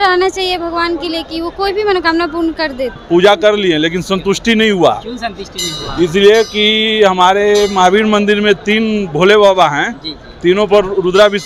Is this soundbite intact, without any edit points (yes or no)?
no